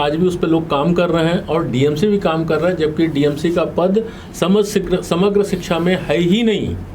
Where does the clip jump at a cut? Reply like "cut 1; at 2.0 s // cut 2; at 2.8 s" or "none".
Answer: none